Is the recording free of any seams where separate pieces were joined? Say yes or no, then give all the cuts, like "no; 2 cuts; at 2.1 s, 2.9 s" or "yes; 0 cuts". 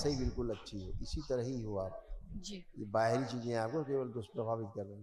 yes; 0 cuts